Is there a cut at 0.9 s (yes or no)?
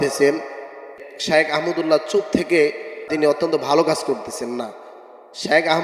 yes